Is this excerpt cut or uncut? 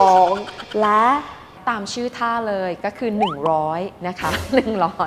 cut